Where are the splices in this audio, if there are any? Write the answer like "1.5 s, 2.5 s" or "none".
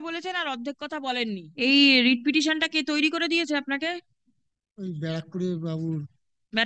1.5 s